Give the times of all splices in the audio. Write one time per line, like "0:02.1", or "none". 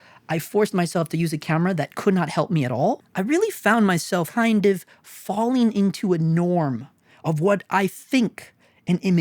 0:03.1